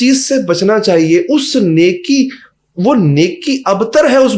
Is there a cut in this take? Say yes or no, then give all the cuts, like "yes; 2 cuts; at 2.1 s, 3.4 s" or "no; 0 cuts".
no; 0 cuts